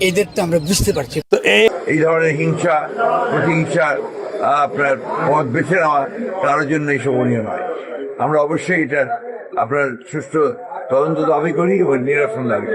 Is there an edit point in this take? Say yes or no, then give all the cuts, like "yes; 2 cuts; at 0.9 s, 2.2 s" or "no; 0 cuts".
yes; 1 cut; at 1.7 s